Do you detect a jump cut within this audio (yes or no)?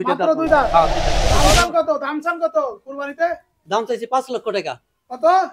yes